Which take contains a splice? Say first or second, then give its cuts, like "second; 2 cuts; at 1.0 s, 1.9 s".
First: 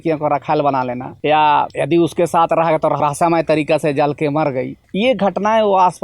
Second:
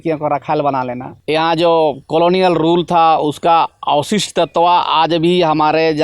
second; 1 cut; at 1.2 s